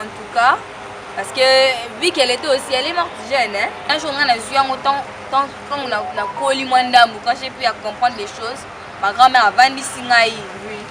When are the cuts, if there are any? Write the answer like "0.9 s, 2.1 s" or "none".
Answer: 3.9 s